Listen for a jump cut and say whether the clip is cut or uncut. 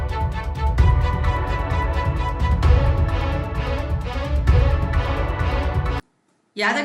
uncut